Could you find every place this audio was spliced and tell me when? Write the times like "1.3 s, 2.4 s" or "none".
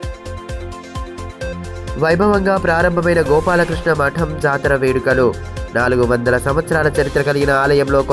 none